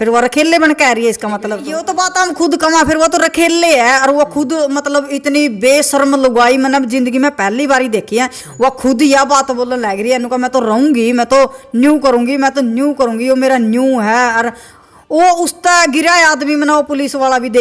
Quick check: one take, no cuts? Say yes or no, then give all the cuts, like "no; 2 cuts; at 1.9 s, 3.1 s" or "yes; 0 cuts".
no; 1 cut; at 1.8 s